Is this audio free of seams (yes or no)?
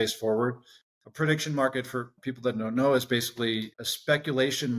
no